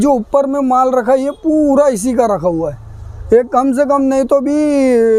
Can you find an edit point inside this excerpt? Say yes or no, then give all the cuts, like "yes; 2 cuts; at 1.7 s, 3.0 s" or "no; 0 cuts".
no; 0 cuts